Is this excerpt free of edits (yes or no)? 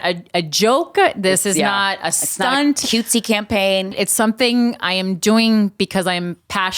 no